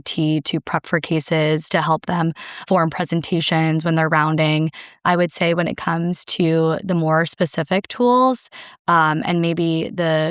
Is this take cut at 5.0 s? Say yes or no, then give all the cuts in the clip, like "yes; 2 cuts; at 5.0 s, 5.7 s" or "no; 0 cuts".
yes; 2 cuts; at 2.6 s, 5.0 s